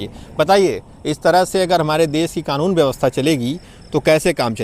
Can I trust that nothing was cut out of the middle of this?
yes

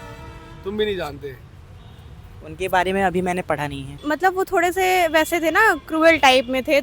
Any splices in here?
yes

